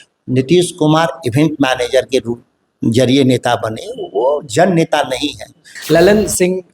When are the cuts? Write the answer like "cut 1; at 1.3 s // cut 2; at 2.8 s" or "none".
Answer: cut 1; at 5.8 s